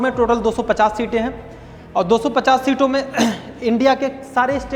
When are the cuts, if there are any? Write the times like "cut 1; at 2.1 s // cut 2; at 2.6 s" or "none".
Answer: none